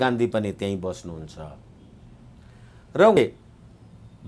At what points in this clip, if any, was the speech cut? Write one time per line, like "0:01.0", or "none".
0:03.2